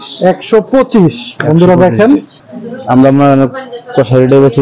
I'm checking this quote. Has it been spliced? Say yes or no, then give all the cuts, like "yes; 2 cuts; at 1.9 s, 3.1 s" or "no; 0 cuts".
yes; 1 cut; at 2.4 s